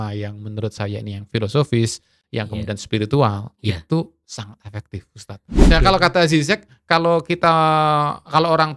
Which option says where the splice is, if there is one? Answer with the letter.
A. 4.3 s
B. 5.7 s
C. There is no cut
B